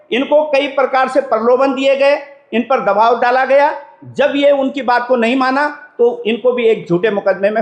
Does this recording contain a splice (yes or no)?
no